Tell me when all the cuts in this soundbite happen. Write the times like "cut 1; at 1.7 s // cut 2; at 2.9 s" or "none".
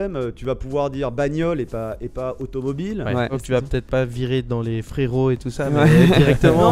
cut 1; at 3.3 s